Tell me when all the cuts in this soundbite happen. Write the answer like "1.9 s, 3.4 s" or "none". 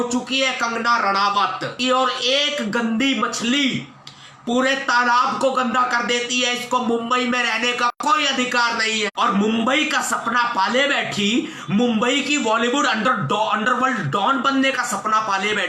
1.8 s, 9.1 s